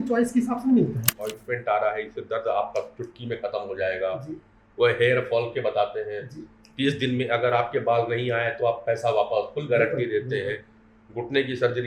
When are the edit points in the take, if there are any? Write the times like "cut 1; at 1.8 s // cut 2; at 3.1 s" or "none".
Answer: cut 1; at 1.1 s